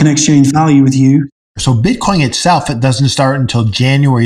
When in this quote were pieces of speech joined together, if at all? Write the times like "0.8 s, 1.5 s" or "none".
1.3 s